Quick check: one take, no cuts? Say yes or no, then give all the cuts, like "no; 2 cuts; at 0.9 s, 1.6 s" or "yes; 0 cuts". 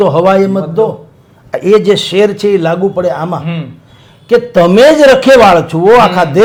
yes; 0 cuts